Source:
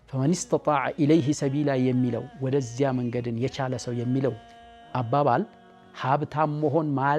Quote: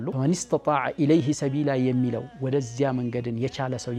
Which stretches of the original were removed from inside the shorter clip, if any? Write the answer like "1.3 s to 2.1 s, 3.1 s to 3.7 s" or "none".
none

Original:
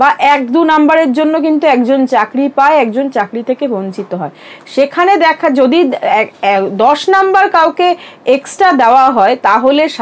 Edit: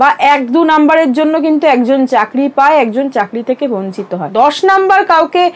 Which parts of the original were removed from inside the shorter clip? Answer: 4.3 s to 6.7 s

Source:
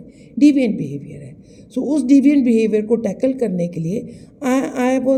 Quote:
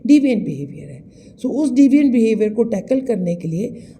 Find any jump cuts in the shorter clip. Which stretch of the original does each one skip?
none

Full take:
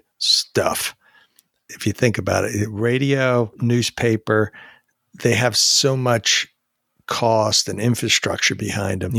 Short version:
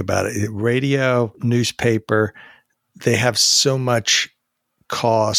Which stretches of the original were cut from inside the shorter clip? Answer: none

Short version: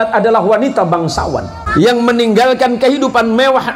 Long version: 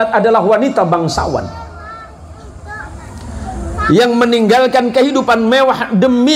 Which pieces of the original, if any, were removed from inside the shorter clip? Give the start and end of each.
1.6 s to 3.7 s

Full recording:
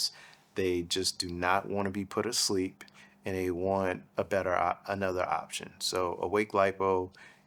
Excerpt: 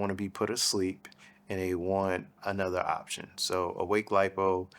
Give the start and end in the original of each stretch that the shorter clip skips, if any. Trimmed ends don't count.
4.1 s to 4.8 s

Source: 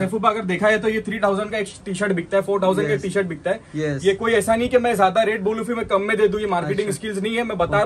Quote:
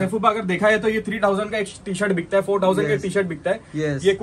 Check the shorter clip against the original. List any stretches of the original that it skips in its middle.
none

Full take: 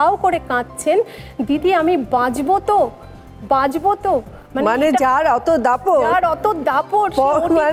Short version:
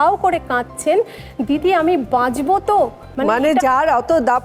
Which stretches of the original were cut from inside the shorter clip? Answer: 3.0 s to 4.4 s

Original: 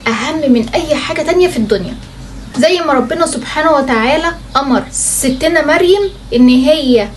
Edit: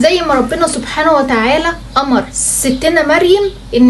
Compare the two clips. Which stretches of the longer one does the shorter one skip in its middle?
none

